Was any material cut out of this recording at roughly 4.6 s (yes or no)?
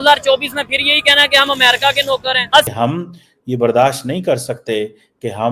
no